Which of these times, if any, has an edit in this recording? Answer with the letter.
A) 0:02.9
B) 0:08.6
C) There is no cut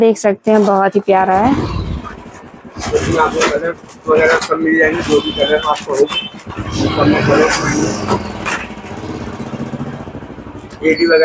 C